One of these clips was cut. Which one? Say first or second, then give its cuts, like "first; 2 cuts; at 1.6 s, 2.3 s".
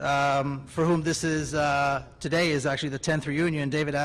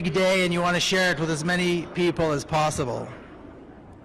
second; 1 cut; at 2.2 s